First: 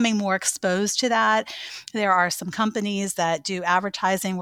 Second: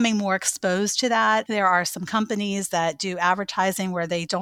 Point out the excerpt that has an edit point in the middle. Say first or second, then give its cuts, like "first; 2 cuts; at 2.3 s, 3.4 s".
second; 1 cut; at 1.5 s